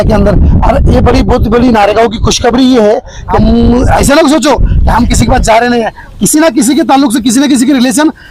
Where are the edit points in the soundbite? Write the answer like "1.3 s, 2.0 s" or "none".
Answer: 3.2 s